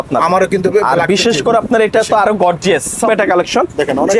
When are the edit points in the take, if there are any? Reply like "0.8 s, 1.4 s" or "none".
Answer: 3.1 s